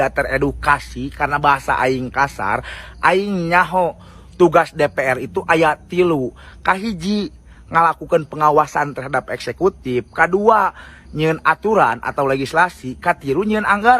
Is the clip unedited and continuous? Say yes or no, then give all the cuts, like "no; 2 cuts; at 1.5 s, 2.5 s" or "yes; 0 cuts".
yes; 0 cuts